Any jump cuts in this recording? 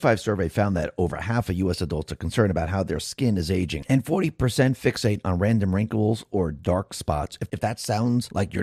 no; 0 cuts

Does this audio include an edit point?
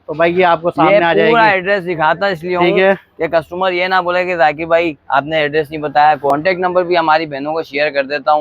yes; 1 cut; at 6.3 s

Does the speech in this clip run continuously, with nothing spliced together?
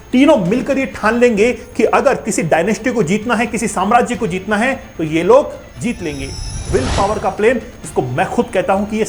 no; 1 cut; at 6.7 s

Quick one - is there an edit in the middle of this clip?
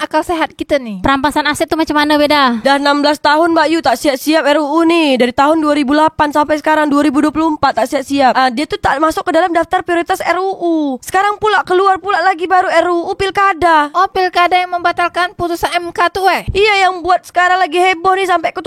no; 0 cuts

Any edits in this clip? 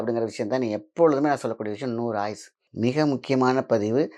yes; 1 cut; at 2.6 s

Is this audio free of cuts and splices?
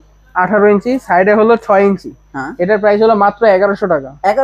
yes; 0 cuts

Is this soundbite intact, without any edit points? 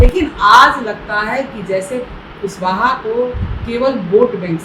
yes; 0 cuts

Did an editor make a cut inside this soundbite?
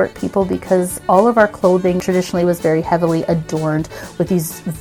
yes; 2 cuts; at 0.9 s, 2.0 s

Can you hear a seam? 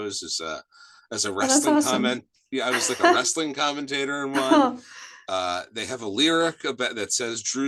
no; 0 cuts

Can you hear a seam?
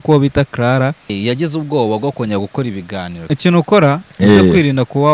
yes; 2 cuts; at 1.1 s, 3.2 s

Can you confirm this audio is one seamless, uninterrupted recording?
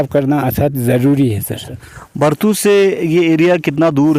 yes; 0 cuts

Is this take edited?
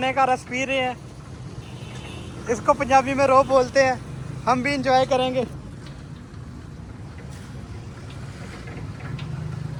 no; 0 cuts

